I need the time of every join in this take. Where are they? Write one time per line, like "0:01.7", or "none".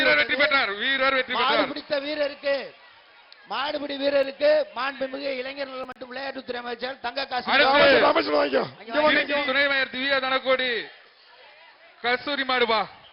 0:09.4

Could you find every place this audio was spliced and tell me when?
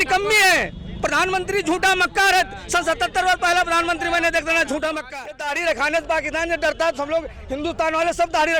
0:05.1

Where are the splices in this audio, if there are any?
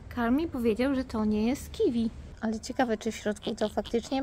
0:02.3

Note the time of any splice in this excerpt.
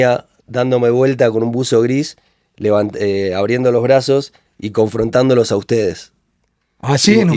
none

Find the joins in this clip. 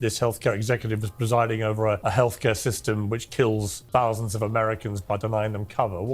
0:02.0
0:03.7

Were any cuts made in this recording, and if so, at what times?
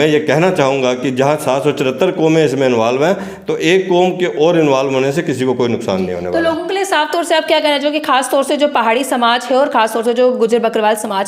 none

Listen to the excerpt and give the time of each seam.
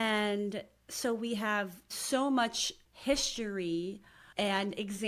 0:01.9

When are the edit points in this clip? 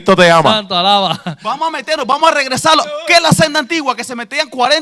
none

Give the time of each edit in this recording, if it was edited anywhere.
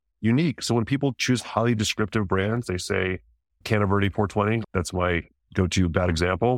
0:04.6

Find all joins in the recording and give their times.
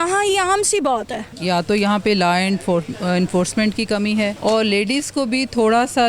0:01.3
0:04.4

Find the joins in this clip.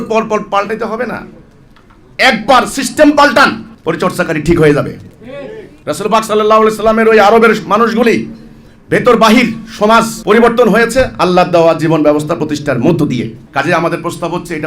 0:03.7
0:13.4

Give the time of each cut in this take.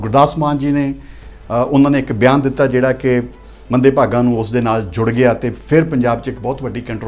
none

